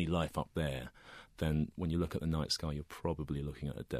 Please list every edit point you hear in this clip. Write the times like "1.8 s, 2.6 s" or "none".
none